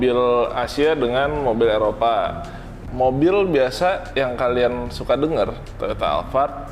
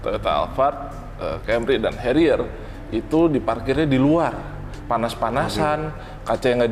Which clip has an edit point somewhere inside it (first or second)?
first